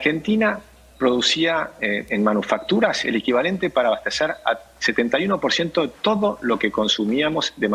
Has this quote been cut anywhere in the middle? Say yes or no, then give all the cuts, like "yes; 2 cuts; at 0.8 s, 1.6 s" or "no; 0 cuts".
no; 0 cuts